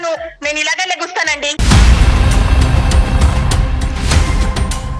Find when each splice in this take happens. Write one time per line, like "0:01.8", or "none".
0:01.6